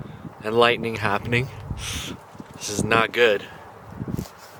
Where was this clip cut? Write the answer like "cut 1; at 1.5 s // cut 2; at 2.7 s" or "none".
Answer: none